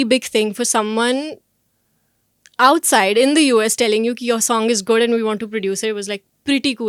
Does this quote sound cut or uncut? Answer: uncut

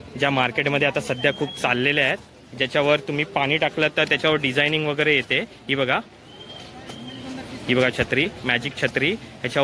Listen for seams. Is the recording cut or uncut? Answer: uncut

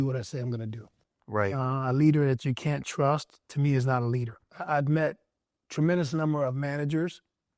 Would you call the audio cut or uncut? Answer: cut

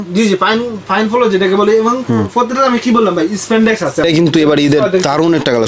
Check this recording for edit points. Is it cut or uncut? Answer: cut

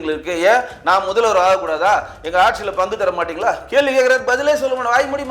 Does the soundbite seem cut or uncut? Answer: uncut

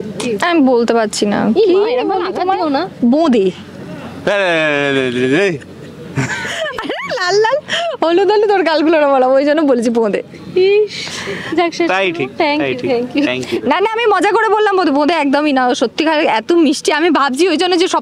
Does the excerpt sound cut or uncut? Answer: uncut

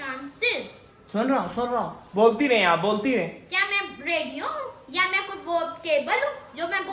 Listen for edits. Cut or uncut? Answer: uncut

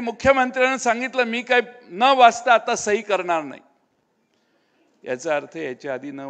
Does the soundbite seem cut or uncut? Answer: uncut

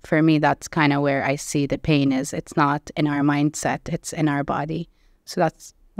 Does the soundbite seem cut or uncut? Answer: uncut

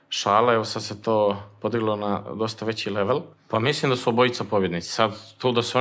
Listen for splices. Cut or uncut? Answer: cut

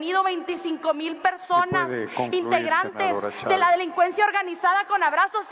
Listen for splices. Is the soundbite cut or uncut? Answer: uncut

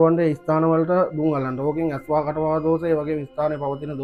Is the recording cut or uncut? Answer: uncut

